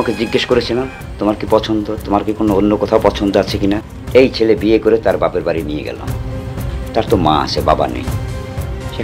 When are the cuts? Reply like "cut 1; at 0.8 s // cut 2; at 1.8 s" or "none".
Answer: cut 1; at 1.0 s // cut 2; at 3.9 s